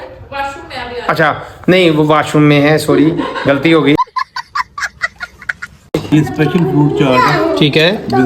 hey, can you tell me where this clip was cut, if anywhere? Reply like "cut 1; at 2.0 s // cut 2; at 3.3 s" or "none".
cut 1; at 6.1 s